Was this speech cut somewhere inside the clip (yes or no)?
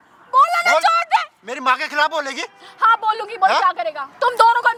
no